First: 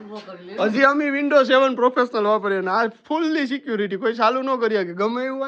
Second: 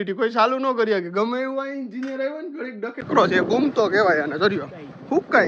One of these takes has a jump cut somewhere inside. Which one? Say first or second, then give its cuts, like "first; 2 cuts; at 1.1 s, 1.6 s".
second; 1 cut; at 3.0 s